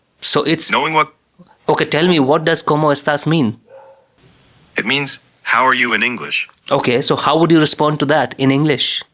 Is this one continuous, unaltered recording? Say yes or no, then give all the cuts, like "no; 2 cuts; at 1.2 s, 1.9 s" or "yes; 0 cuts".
yes; 0 cuts